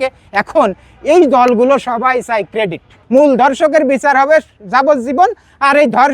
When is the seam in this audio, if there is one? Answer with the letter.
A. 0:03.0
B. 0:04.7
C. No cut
A